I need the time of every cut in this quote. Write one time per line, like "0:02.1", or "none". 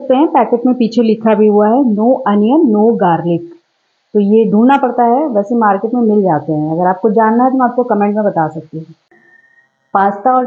none